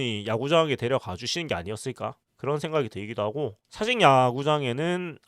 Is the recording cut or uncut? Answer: cut